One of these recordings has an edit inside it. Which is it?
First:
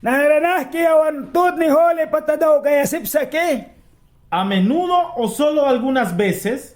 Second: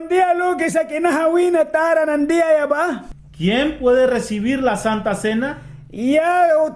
second; 1 cut; at 3.0 s

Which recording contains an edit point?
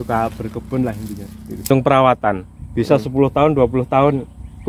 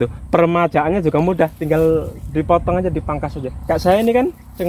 first; 1 cut; at 1.7 s

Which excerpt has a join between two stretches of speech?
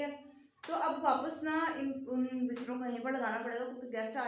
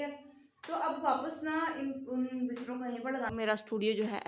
second; 1 cut; at 3.3 s

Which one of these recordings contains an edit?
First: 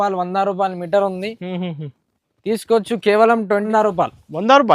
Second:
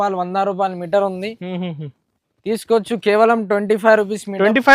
first; 1 cut; at 3.6 s

